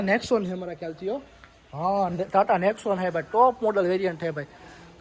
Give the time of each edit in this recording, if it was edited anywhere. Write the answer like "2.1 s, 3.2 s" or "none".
none